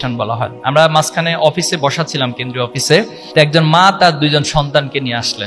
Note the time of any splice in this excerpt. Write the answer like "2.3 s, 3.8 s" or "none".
3.2 s